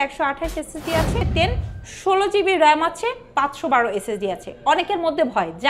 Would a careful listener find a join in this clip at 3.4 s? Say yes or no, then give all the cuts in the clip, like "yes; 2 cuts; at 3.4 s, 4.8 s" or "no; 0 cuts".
no; 1 cut; at 1.3 s